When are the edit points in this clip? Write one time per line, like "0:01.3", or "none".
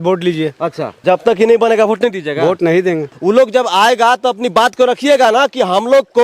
0:00.9
0:03.1